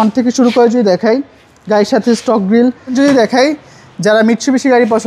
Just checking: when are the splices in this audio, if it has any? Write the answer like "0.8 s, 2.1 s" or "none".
3.0 s